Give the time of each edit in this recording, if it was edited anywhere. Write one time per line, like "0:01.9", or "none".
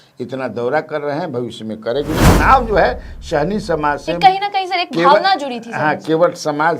0:02.2